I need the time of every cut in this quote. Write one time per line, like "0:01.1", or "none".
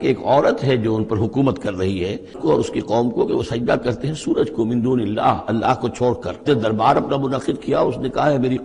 0:02.4
0:06.4